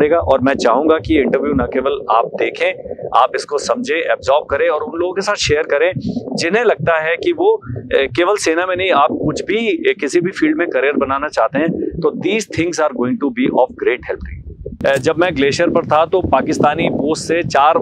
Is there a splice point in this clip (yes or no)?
yes